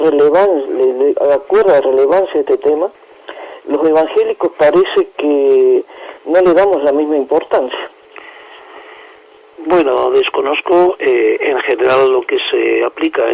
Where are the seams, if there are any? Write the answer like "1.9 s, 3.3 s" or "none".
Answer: 11.9 s

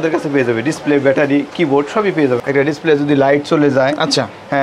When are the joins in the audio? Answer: 2.4 s

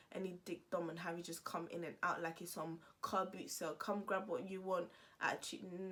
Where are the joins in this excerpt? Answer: none

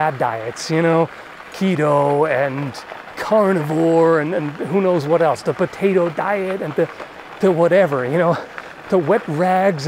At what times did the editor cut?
none

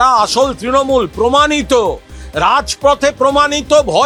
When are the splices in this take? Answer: none

